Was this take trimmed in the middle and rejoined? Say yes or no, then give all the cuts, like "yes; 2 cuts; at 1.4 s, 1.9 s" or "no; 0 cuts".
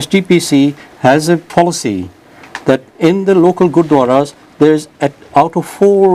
yes; 1 cut; at 3.3 s